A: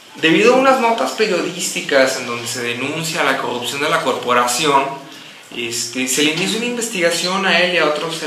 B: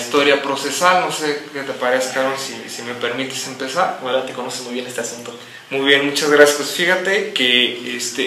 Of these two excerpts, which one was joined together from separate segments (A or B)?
B